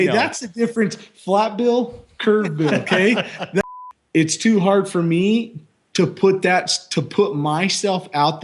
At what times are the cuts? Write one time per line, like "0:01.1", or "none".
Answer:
0:03.6